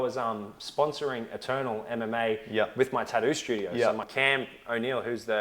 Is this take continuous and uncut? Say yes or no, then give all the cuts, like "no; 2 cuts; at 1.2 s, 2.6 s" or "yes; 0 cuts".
no; 1 cut; at 4.1 s